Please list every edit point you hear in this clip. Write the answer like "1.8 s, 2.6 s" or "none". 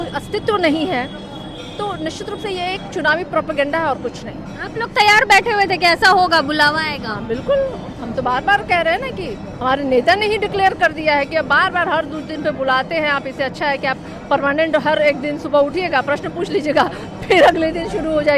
none